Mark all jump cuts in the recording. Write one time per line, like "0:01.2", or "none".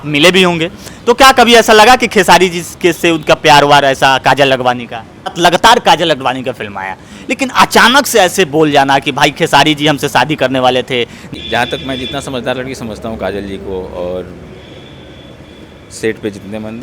0:05.4
0:11.3

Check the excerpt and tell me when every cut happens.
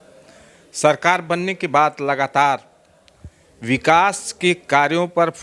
none

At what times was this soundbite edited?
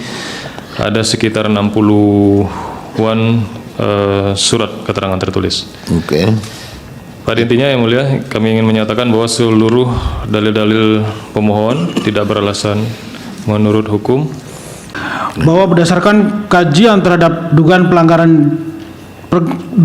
0:14.9

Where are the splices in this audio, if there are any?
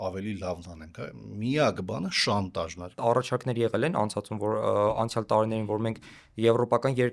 0:03.0

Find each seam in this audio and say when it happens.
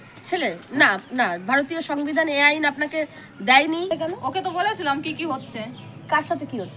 0:03.9

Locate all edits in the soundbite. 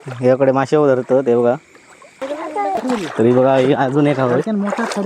0:02.2

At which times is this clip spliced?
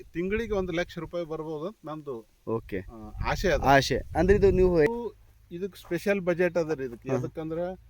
0:04.9

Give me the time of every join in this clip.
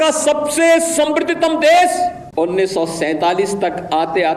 0:02.2

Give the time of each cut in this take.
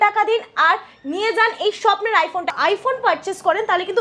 0:02.5

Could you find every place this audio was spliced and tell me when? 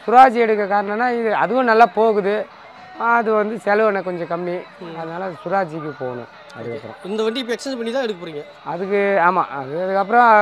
none

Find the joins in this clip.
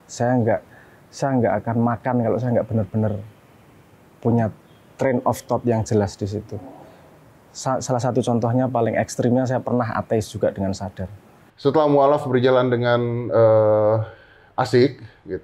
0:11.4

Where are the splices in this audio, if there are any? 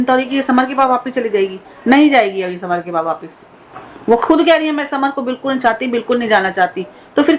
none

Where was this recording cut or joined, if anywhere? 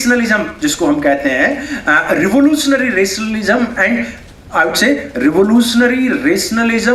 none

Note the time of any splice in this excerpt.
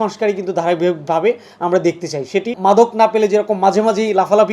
0:02.5

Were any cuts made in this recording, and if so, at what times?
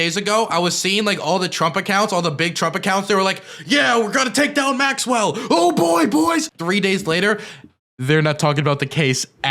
0:06.5

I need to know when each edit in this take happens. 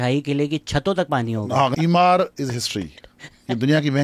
0:01.7

